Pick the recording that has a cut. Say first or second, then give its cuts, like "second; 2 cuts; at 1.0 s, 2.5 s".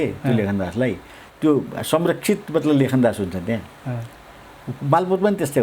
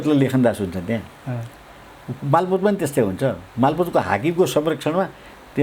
first; 1 cut; at 1.3 s